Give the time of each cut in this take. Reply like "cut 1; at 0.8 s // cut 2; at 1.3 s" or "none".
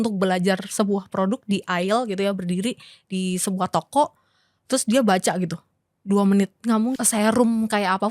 cut 1; at 7.0 s